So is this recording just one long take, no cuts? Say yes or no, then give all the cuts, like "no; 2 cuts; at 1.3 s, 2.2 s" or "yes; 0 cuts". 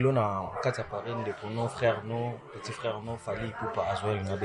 yes; 0 cuts